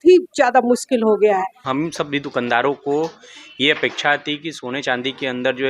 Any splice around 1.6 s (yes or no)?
yes